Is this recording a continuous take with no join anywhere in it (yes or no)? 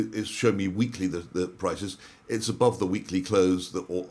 yes